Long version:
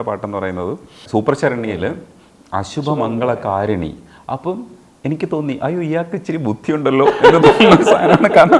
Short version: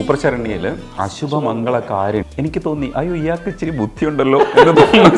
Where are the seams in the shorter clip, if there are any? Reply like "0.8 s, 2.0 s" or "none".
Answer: 0.9 s, 2.3 s